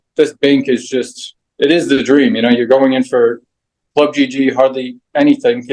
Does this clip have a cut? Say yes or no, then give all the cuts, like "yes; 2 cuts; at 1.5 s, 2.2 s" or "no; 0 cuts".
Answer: no; 0 cuts